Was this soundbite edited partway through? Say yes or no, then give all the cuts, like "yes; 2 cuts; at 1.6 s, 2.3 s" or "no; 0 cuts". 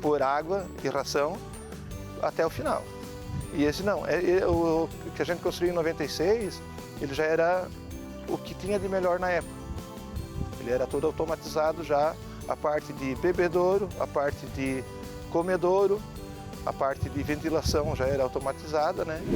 no; 0 cuts